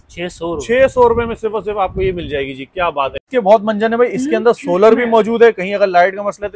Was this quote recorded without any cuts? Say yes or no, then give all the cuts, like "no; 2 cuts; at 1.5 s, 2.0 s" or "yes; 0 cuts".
no; 1 cut; at 3.2 s